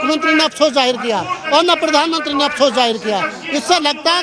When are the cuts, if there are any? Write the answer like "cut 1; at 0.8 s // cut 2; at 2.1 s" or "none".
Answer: none